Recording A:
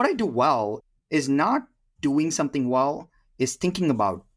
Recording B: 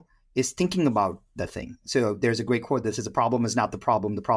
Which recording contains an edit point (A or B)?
A